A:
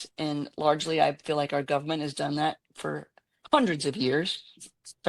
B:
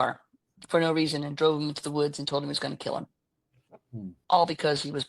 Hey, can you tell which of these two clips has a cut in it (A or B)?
B